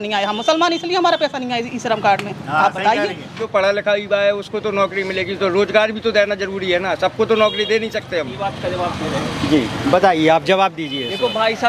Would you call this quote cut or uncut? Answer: cut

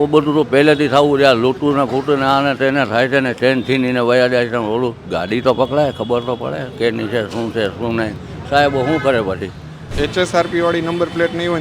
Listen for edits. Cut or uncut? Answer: cut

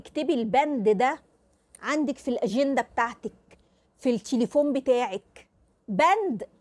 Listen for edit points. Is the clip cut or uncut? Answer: uncut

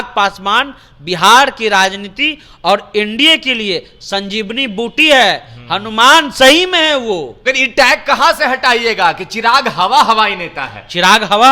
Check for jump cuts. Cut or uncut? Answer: cut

